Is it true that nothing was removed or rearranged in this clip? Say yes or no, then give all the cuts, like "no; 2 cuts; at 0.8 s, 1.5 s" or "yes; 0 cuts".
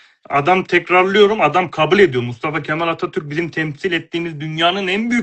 yes; 0 cuts